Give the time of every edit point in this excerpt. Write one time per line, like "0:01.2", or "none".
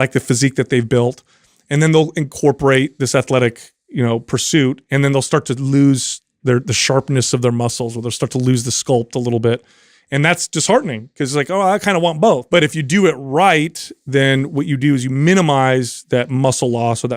0:12.4